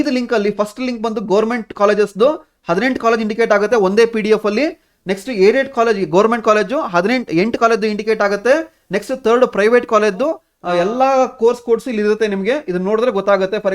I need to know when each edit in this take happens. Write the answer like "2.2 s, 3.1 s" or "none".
10.5 s